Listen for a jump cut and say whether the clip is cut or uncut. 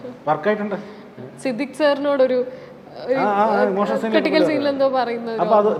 uncut